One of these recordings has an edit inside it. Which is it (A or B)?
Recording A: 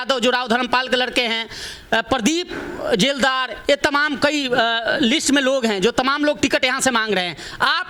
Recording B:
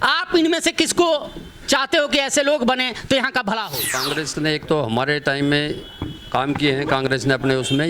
B